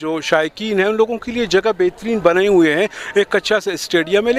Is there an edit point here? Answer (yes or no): no